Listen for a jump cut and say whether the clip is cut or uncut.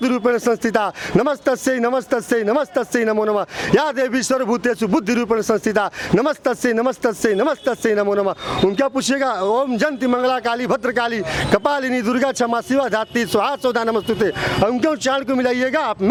uncut